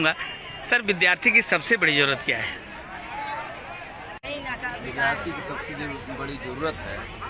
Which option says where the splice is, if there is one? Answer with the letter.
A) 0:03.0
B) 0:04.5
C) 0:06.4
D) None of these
B